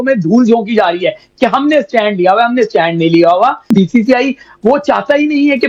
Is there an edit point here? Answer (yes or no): no